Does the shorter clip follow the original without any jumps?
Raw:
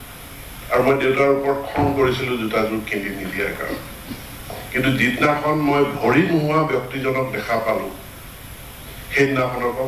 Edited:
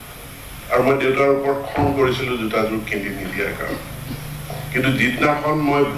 yes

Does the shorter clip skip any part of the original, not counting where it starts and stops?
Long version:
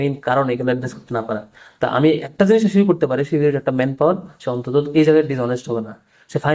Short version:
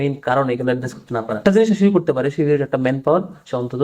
yes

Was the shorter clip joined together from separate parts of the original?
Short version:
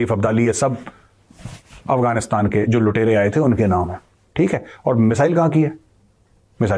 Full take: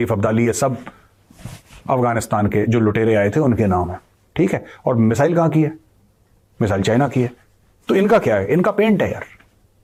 no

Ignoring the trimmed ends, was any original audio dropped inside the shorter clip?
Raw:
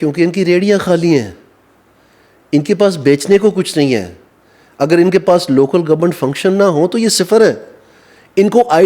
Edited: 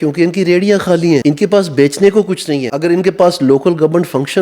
yes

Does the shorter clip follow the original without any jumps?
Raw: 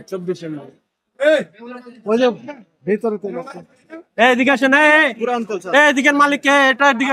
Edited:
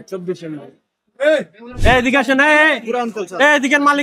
no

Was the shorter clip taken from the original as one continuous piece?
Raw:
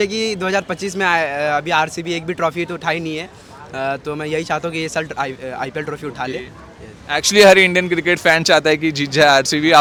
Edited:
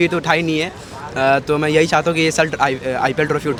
yes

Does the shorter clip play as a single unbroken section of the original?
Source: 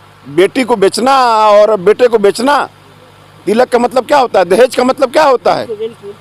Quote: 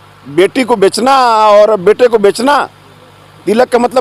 yes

